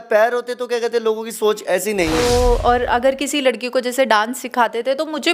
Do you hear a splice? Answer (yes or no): yes